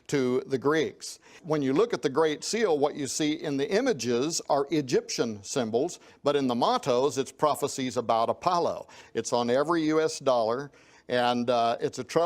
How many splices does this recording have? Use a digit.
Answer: 2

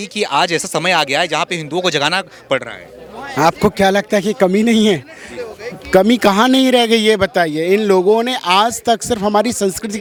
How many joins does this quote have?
0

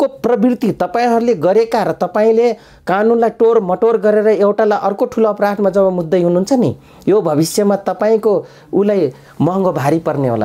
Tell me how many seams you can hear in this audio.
0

